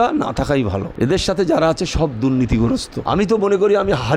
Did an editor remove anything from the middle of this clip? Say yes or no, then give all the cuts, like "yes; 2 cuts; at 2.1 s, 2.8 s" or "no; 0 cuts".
yes; 2 cuts; at 0.9 s, 2.9 s